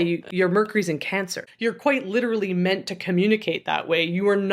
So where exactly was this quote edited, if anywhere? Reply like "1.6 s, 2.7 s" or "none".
1.4 s